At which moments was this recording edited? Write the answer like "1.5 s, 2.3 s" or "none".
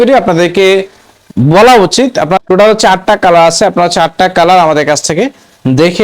2.4 s